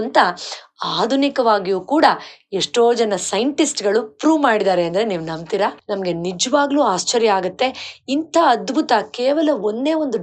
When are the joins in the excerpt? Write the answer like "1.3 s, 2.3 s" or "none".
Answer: 5.8 s